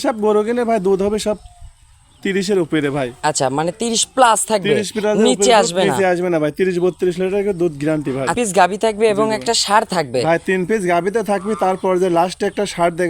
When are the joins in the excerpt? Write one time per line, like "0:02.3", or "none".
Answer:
0:08.3